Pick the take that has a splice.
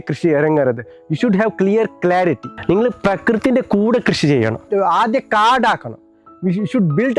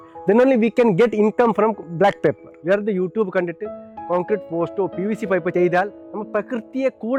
first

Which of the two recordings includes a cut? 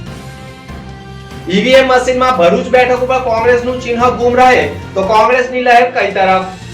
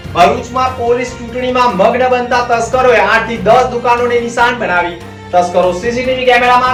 first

